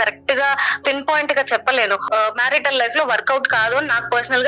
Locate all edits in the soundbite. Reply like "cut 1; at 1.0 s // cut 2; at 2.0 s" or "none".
cut 1; at 2.1 s